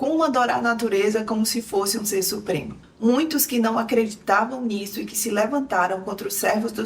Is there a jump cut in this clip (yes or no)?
yes